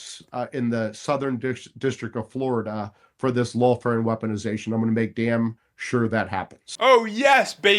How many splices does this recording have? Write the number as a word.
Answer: one